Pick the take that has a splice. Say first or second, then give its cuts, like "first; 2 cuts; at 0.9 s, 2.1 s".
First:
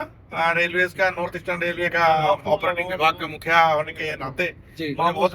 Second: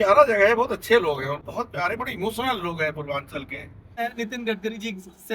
second; 2 cuts; at 1.4 s, 4.0 s